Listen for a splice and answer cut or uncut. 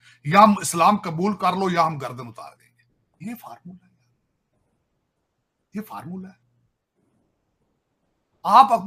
uncut